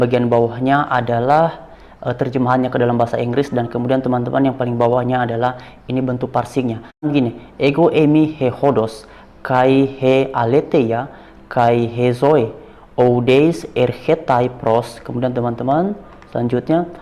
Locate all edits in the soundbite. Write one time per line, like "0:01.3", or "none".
0:07.1